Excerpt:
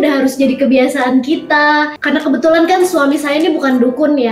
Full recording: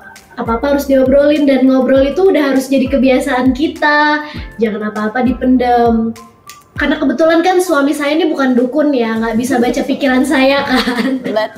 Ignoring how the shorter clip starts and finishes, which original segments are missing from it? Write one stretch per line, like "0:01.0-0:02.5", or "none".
0:04.3-0:06.7